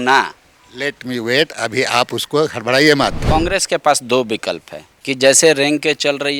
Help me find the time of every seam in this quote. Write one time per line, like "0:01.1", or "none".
0:03.2